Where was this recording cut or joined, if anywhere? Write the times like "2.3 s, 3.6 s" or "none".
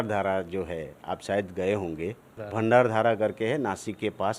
2.3 s